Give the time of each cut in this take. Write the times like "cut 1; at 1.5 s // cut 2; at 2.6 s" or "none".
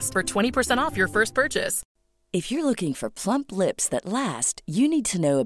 cut 1; at 1.8 s